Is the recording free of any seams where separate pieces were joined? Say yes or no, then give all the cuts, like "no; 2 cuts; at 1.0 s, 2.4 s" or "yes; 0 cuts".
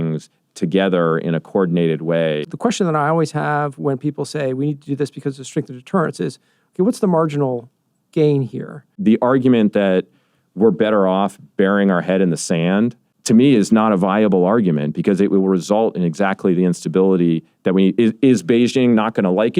no; 3 cuts; at 2.5 s, 9.0 s, 13.1 s